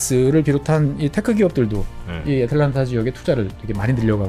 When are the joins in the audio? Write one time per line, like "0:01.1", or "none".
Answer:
none